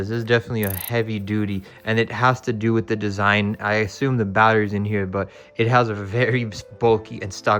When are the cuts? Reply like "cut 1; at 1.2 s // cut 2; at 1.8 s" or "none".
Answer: none